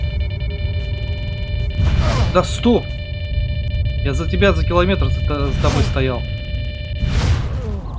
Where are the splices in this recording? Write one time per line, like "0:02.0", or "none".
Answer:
none